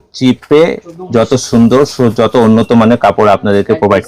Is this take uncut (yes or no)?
yes